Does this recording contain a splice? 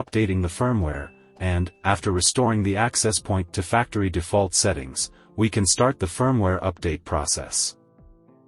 yes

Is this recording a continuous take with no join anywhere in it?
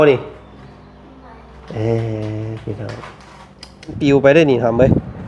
no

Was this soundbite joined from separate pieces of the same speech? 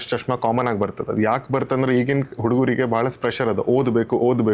no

